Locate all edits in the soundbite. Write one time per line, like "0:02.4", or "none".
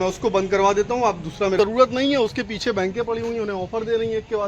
0:01.6